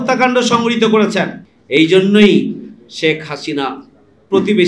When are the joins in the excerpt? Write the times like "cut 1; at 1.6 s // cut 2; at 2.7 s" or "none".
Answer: cut 1; at 1.4 s